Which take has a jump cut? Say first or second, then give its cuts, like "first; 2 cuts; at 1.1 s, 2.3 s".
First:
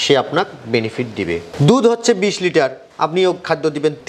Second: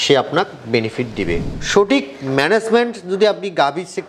second; 1 cut; at 1.5 s